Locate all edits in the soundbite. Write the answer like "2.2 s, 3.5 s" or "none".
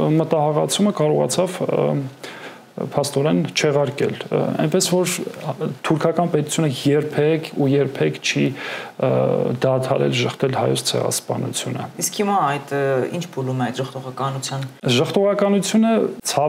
none